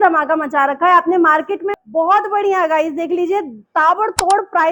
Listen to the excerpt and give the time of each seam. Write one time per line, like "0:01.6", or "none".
0:01.6